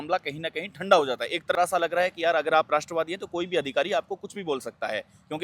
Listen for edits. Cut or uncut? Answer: cut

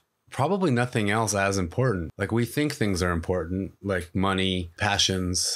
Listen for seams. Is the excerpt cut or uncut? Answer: cut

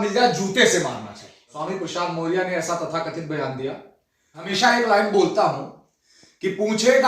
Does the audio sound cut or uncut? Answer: cut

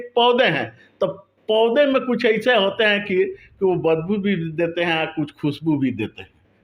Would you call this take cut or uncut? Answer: uncut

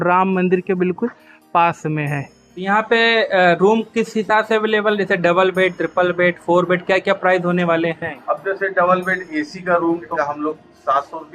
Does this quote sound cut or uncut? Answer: cut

